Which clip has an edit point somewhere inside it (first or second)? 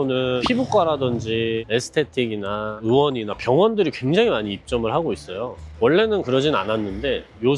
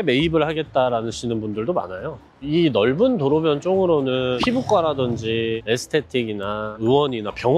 second